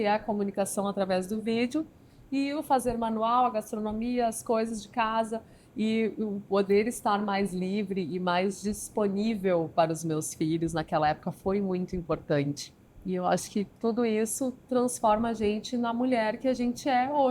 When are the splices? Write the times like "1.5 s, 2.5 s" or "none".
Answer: 12.7 s